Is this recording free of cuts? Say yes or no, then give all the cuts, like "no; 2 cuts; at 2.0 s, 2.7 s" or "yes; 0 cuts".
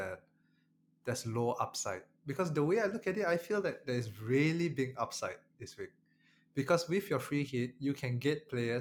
yes; 0 cuts